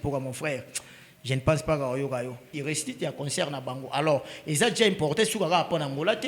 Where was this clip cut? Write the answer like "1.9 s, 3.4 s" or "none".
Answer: 2.5 s